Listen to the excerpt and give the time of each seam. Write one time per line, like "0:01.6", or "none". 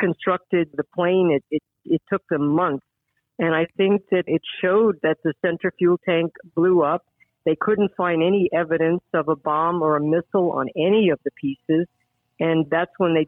none

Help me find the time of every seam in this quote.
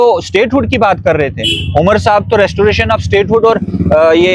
none

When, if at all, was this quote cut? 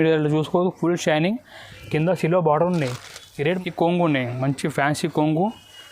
0:03.6

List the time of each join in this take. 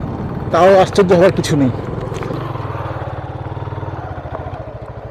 0:02.3

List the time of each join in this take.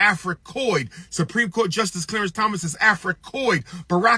none

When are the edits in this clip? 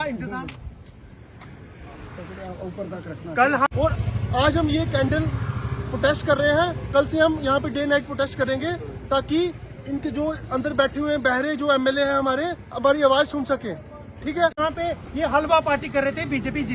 0:03.7
0:14.5

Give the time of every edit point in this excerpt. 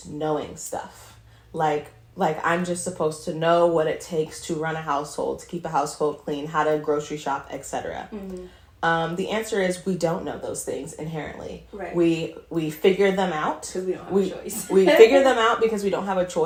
none

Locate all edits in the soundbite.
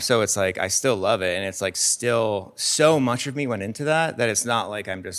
none

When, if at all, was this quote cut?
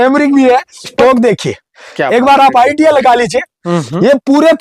0:00.9

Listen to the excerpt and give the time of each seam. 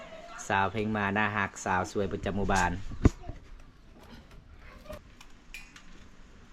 0:05.0

